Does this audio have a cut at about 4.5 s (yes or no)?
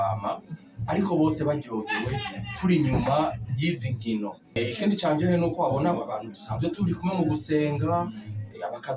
yes